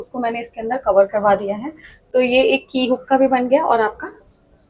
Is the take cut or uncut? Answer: uncut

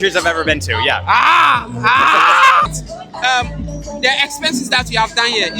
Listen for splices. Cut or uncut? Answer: cut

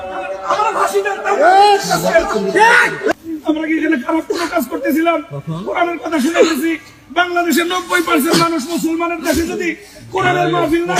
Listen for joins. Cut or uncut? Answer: cut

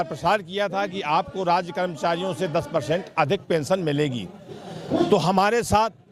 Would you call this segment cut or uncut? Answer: uncut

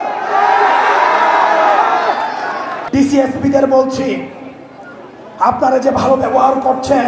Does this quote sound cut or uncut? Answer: cut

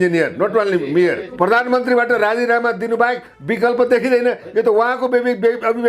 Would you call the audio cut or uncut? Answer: cut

